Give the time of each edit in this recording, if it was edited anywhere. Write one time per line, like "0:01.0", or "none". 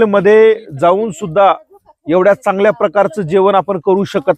none